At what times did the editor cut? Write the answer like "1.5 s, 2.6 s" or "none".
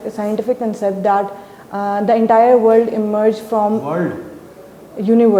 none